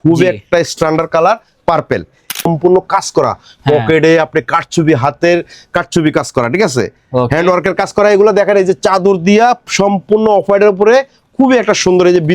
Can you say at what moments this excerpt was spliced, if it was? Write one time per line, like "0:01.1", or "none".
0:02.4

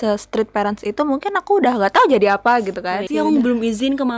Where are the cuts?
0:03.0

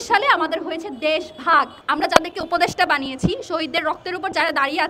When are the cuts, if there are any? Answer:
0:01.8

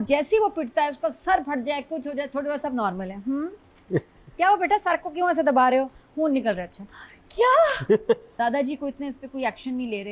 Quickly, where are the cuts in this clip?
0:08.3

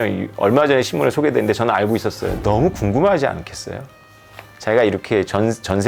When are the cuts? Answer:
0:02.3

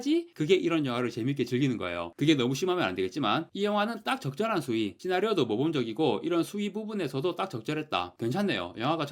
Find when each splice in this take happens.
0:08.1

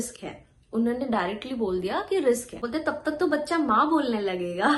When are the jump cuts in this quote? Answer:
0:02.7

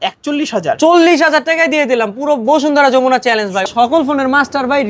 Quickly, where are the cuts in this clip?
0:03.7

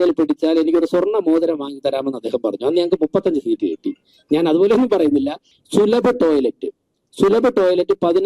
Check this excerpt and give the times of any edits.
0:05.5

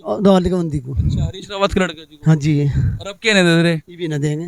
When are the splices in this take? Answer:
none

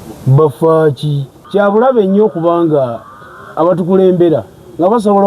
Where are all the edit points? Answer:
0:01.4

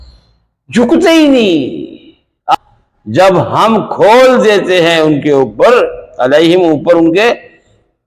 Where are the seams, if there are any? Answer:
0:02.5

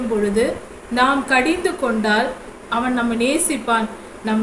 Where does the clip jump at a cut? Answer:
0:02.5

